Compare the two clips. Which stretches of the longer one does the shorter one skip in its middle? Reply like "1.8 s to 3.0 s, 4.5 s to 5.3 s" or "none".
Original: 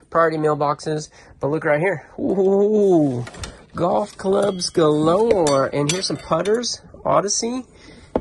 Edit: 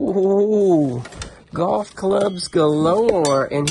none